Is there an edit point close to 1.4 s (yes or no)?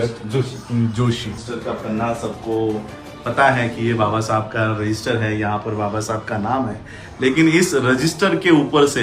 yes